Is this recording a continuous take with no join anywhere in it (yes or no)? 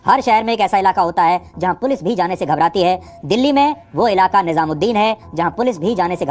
yes